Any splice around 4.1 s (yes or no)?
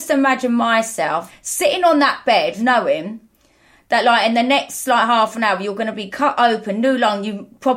no